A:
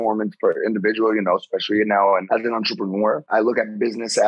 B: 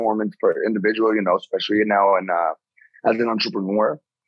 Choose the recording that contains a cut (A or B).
A